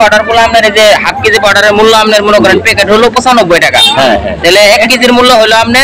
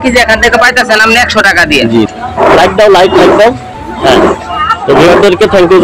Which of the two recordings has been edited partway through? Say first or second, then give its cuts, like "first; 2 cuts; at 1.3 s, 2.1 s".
second; 1 cut; at 2.2 s